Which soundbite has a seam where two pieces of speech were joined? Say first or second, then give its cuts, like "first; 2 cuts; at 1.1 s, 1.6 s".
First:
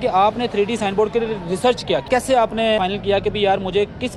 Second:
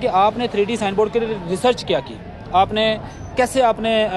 first; 2 cuts; at 2.0 s, 2.8 s